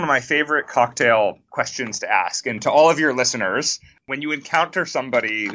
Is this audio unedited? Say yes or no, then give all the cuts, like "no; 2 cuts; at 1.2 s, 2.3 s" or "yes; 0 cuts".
no; 2 cuts; at 1.4 s, 4.0 s